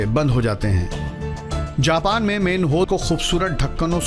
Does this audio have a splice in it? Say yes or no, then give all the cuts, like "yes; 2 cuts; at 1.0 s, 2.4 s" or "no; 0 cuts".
no; 0 cuts